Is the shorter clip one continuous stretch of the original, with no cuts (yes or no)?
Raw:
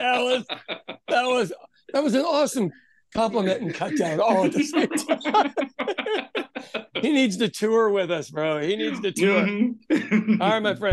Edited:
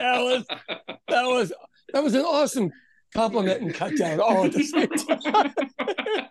yes